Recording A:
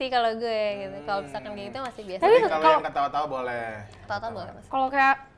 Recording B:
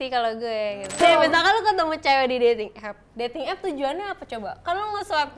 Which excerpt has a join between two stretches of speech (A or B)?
B